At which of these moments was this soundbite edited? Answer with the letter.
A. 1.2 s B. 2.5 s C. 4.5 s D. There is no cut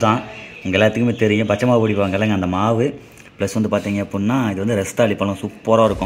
D